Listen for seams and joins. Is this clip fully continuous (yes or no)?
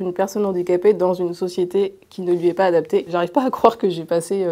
no